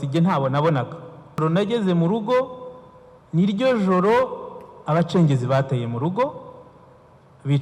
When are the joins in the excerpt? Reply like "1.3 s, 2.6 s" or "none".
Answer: 1.4 s